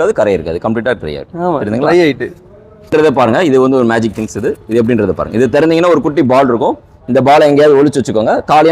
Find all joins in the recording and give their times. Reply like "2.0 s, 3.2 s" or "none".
2.9 s